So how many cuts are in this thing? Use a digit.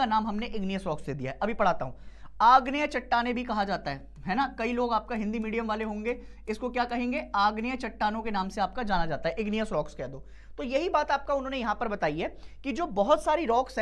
0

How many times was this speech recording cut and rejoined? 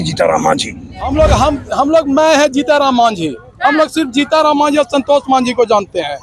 1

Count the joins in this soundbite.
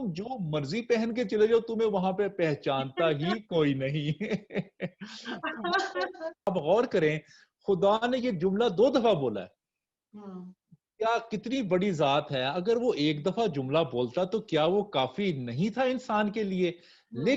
1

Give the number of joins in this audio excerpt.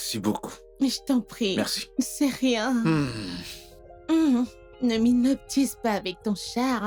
0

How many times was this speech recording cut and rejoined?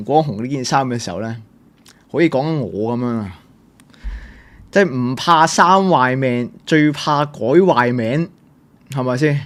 0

